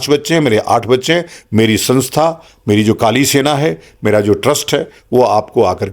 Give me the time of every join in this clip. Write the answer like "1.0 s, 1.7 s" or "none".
none